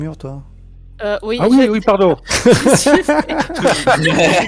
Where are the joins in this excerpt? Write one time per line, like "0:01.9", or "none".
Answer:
none